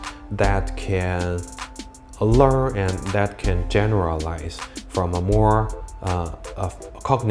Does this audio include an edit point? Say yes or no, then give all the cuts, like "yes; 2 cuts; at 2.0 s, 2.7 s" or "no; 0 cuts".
no; 0 cuts